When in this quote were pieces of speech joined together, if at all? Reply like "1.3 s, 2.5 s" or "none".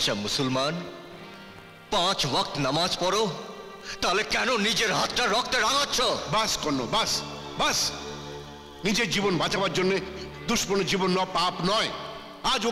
none